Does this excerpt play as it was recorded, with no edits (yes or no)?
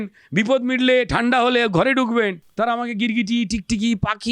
no